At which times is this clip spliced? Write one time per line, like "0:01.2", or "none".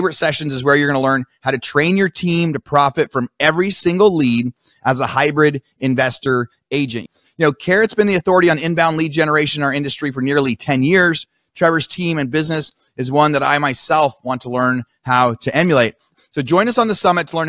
0:07.0
0:16.1